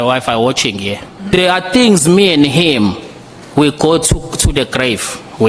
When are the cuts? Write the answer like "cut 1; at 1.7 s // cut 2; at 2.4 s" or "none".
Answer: cut 1; at 1.4 s